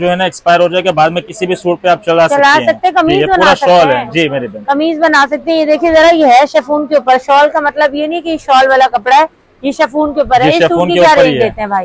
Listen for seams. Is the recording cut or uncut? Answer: uncut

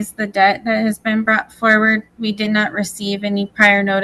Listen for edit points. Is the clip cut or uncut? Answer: uncut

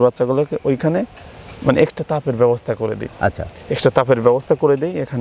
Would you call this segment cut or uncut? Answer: uncut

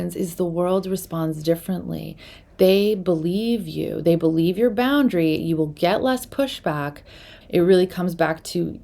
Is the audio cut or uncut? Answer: cut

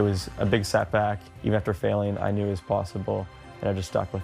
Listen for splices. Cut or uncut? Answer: cut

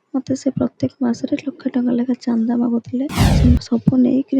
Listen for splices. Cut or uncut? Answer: cut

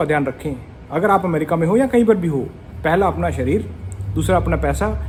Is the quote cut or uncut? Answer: uncut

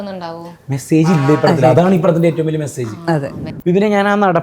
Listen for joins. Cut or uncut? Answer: cut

